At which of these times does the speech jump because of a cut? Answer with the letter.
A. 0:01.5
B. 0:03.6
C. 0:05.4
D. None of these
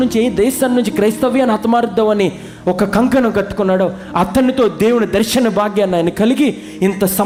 D